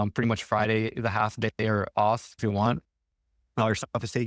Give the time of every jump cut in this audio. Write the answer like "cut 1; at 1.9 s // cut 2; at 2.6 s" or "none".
cut 1; at 2.4 s